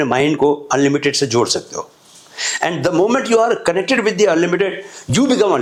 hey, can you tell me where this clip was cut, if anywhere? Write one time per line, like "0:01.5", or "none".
none